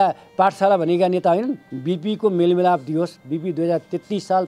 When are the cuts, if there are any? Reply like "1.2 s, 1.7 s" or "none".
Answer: 1.7 s